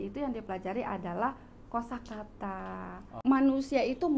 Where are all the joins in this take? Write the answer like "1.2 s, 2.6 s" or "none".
3.1 s